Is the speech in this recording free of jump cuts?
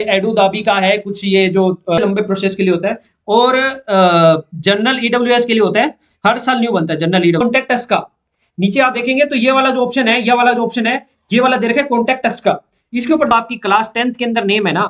no; 3 cuts; at 2.0 s, 7.4 s, 13.3 s

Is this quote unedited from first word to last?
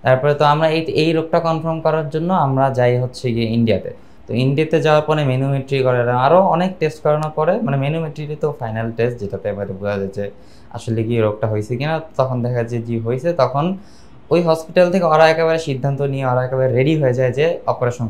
yes; 0 cuts

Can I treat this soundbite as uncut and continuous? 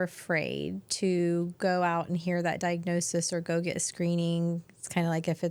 yes; 0 cuts

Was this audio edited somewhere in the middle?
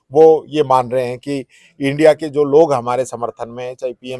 no; 0 cuts

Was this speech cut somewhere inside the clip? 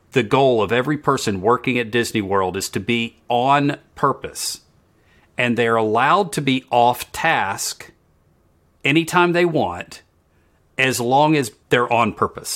yes; 1 cut; at 11.6 s

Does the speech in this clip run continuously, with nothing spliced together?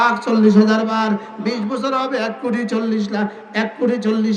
yes; 0 cuts

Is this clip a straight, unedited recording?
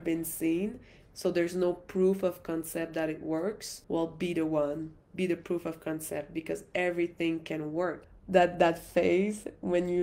no; 2 cuts; at 3.7 s, 8.1 s

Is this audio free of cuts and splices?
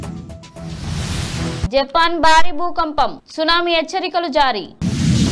yes; 0 cuts

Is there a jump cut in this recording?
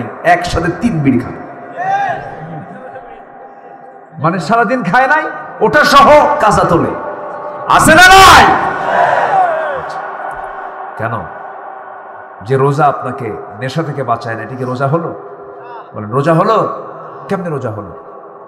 no; 0 cuts

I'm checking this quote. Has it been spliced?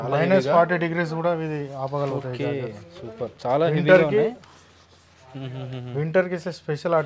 no; 0 cuts

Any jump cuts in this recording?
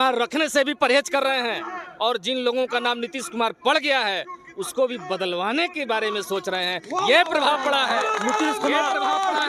no; 0 cuts

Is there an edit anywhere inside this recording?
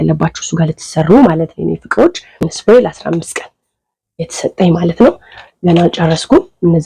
yes; 1 cut; at 2.5 s

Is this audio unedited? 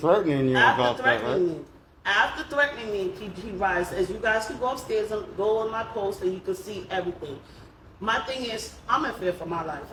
yes; 0 cuts

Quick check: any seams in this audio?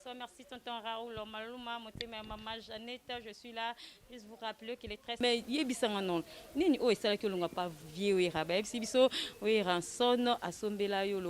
yes; 1 cut; at 5.2 s

